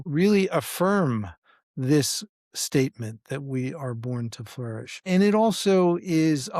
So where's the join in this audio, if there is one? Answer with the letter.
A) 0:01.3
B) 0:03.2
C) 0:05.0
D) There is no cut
D